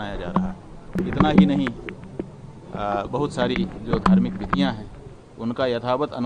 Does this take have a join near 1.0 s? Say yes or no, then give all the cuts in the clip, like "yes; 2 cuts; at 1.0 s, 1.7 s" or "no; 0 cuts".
yes; 1 cut; at 1.0 s